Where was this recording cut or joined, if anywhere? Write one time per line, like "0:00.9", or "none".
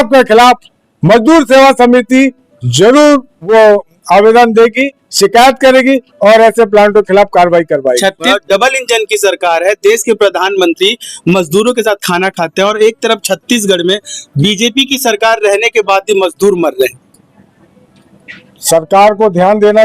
0:03.5
0:08.3